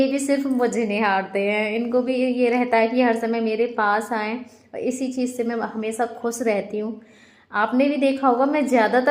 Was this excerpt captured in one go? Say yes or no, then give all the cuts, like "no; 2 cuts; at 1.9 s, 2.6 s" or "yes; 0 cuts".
yes; 0 cuts